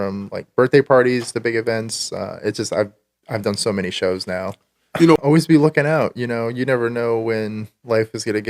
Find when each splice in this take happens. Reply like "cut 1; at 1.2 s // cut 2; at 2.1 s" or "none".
cut 1; at 5.2 s